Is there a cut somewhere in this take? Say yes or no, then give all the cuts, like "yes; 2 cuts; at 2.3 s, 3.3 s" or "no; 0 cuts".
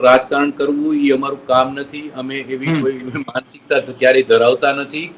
no; 0 cuts